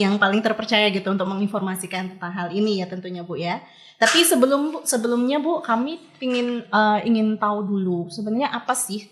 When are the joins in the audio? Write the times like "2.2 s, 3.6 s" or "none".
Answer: none